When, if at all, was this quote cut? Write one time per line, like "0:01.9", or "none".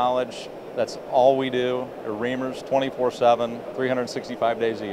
none